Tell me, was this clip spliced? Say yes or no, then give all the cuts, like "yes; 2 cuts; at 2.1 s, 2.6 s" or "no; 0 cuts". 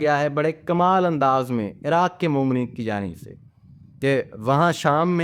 no; 0 cuts